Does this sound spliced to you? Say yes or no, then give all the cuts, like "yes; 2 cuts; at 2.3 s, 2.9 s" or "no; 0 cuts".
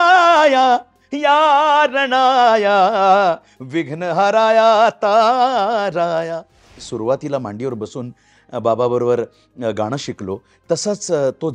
yes; 1 cut; at 6.8 s